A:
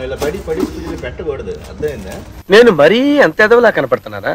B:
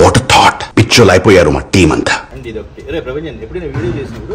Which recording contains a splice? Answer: B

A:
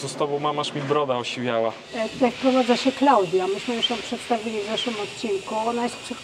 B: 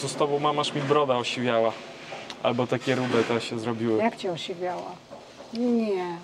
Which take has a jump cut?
A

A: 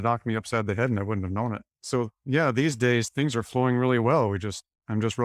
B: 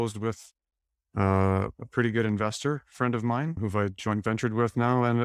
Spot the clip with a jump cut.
A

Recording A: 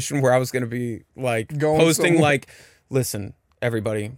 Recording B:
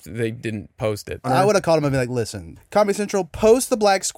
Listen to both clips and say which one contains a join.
B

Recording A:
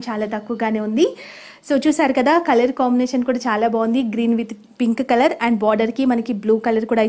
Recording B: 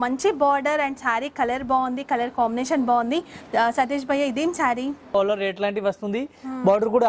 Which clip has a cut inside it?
B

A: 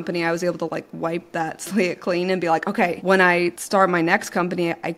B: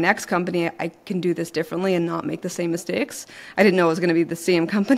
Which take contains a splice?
A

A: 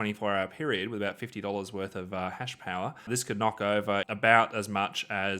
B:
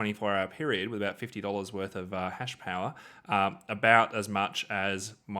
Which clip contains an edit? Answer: A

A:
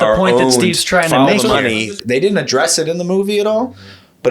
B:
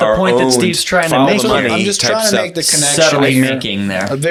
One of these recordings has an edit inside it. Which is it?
A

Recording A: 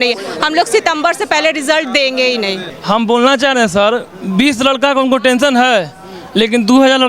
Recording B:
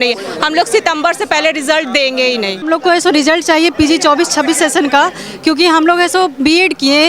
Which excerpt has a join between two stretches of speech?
B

